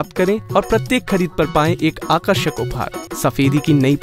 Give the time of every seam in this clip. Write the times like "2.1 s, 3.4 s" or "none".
3.0 s